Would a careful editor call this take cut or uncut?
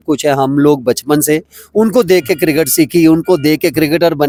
uncut